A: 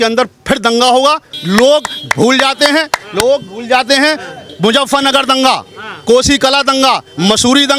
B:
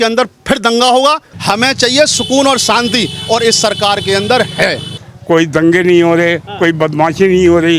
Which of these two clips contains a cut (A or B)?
B